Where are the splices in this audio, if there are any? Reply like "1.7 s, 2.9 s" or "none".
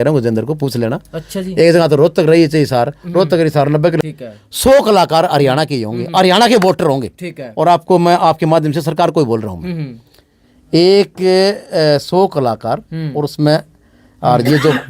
4.0 s